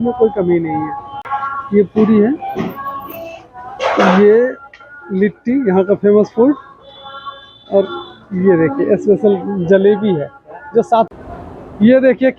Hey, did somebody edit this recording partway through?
yes; 2 cuts; at 1.0 s, 11.1 s

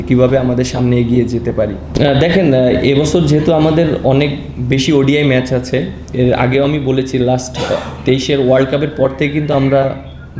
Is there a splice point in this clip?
no; 0 cuts

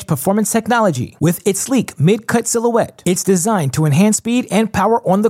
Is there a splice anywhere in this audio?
no; 0 cuts

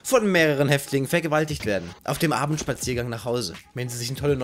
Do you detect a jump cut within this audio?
no; 0 cuts

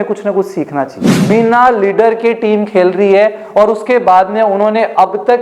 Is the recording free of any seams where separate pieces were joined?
no; 1 cut; at 1.1 s

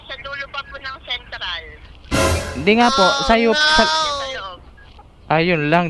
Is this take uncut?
yes; 0 cuts

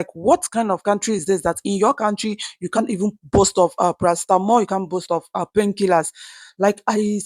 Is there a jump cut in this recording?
no; 0 cuts

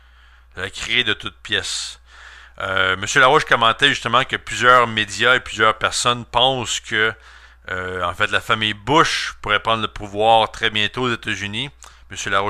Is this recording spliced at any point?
no; 0 cuts

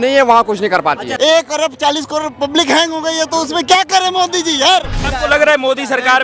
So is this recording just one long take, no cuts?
no; 2 cuts; at 1.1 s, 5.0 s

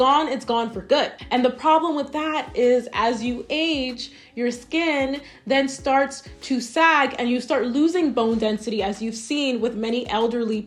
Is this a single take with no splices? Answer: yes; 0 cuts

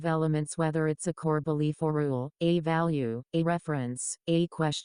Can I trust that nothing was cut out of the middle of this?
yes; 0 cuts

